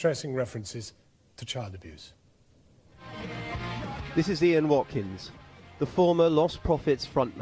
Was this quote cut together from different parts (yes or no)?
yes